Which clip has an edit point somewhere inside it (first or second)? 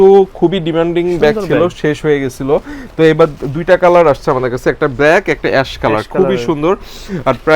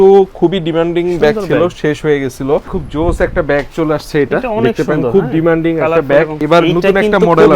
second